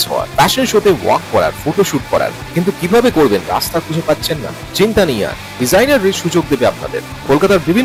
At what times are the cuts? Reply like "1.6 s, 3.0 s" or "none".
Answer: none